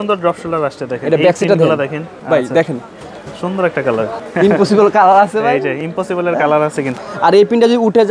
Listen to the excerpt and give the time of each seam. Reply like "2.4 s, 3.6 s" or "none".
2.1 s, 4.2 s, 6.9 s